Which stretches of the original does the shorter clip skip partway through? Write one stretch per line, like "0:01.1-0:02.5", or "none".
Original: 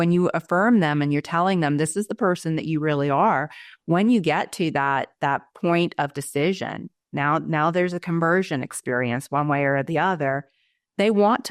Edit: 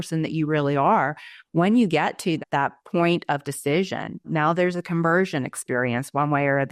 0:04.7-0:05.1
0:07.0-0:07.5

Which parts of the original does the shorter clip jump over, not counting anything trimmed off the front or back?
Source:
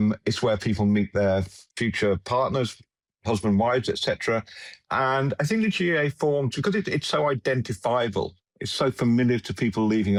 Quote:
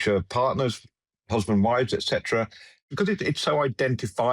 0:04.8-0:06.5

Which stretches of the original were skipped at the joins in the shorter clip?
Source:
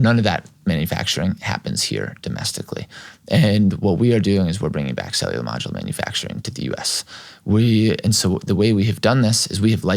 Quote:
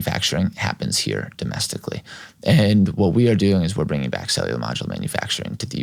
none

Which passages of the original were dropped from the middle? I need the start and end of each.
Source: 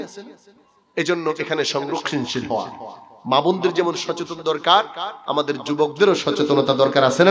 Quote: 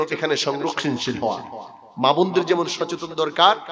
none

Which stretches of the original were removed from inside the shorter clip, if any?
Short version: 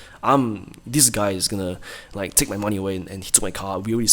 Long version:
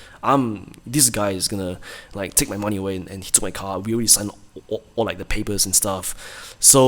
none

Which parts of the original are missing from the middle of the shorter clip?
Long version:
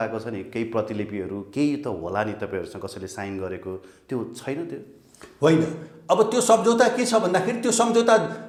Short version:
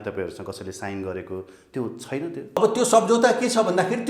0:04.9-0:06.1

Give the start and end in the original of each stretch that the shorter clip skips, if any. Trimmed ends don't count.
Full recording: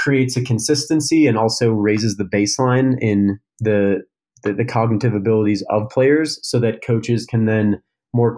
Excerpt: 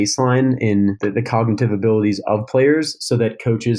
0:03.4-0:04.4

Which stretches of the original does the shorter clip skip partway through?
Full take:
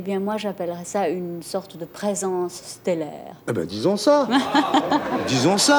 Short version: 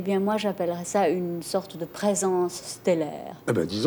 none

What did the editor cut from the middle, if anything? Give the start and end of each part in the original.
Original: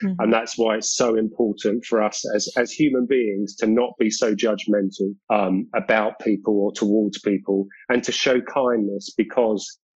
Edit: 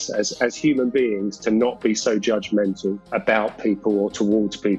0:05.2-0:05.7

